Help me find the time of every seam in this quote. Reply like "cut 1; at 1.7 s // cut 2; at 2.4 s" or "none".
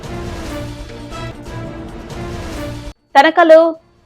cut 1; at 2.5 s

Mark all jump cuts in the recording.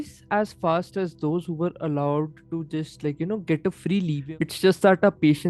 cut 1; at 4.2 s

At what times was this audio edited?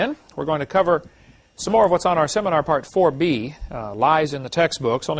none

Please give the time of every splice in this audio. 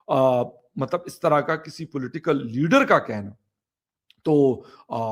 cut 1; at 1.5 s

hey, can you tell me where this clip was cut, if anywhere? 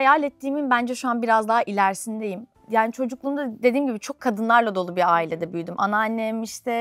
none

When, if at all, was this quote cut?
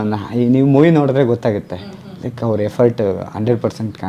none

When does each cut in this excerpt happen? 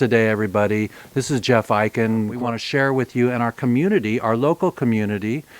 cut 1; at 2.3 s

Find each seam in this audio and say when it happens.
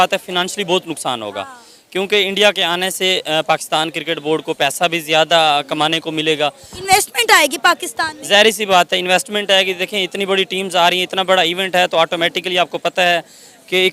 none

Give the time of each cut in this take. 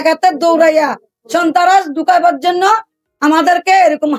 none

